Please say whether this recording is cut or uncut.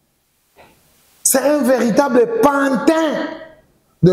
uncut